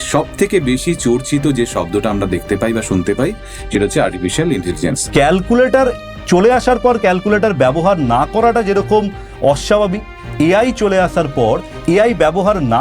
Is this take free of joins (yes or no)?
no